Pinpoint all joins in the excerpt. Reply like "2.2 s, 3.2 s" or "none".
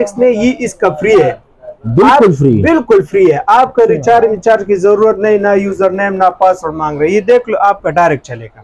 none